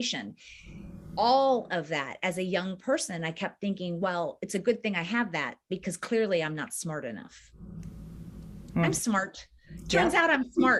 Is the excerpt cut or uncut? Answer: uncut